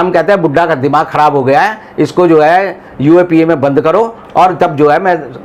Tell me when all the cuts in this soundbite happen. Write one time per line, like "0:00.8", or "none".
none

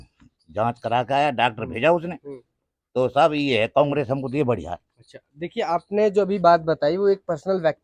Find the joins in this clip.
none

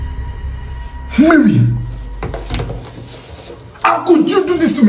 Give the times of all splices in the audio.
0:00.9

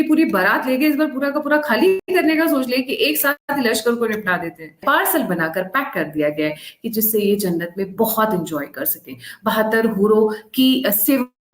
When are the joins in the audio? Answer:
0:02.0
0:03.4
0:04.8

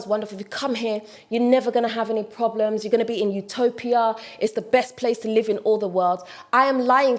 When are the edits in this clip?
none

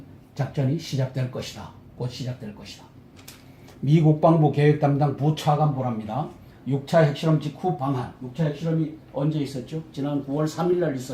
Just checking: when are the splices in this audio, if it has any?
none

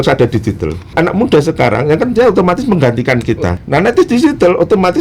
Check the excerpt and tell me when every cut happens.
0:00.9
0:03.5

